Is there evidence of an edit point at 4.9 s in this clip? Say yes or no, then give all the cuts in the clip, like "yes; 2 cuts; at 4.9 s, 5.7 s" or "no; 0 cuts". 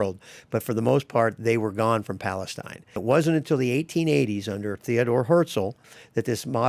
no; 1 cut; at 3.0 s